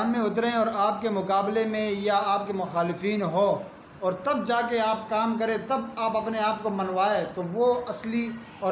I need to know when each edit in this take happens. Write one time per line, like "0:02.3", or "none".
none